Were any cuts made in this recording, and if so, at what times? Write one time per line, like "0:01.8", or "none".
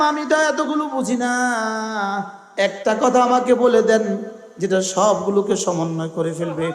0:02.4